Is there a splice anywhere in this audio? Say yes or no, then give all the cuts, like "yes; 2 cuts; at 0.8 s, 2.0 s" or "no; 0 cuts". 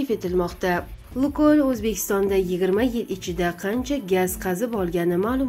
yes; 1 cut; at 0.9 s